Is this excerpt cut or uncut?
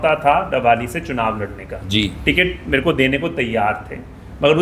uncut